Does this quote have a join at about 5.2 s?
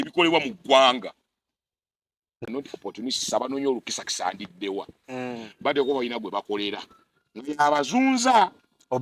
no; 1 cut; at 2.4 s

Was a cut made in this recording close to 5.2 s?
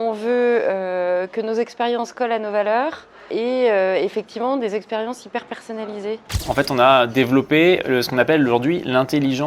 no; 2 cuts; at 3.3 s, 6.4 s

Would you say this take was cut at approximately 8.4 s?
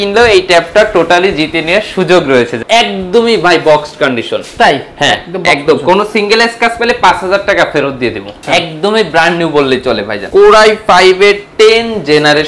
yes; 3 cuts; at 2.6 s, 8.4 s, 10.1 s

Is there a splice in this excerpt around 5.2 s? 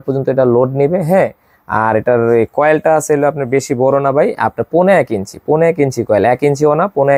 no; 0 cuts

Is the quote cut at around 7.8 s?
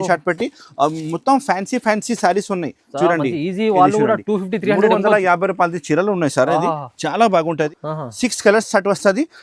yes; 1 cut; at 7.8 s

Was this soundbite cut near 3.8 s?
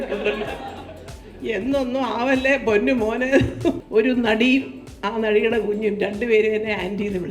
yes; 1 cut; at 3.8 s

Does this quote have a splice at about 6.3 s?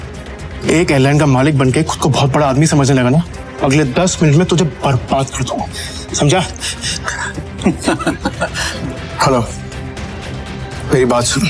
no; 2 cuts; at 3.4 s, 8.6 s

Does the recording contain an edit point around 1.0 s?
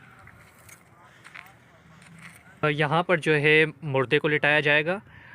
no; 1 cut; at 2.6 s

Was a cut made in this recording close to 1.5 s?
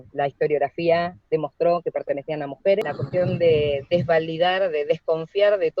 no; 1 cut; at 2.8 s

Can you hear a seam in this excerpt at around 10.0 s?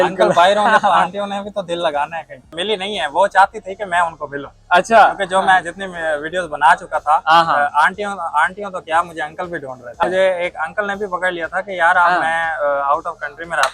yes; 2 cuts; at 2.6 s, 10.0 s

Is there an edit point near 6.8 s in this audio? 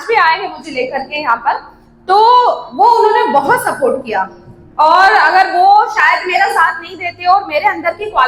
no; 0 cuts

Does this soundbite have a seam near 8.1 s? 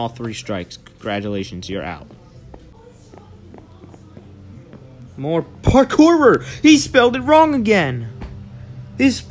no; 1 cut; at 2.7 s

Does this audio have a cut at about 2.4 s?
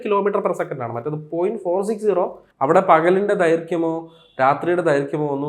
yes; 1 cut; at 2.4 s

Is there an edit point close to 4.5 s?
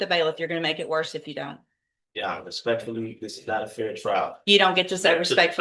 no; 0 cuts

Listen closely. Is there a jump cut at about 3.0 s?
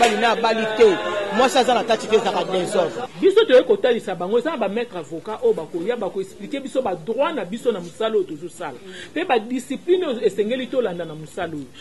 yes; 1 cut; at 3.0 s

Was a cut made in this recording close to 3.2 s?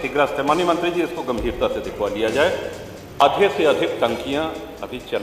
yes; 1 cut; at 3.2 s

